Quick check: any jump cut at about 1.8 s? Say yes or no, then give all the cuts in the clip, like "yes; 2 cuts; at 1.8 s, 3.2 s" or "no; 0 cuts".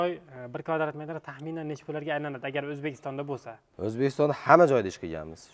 no; 1 cut; at 3.6 s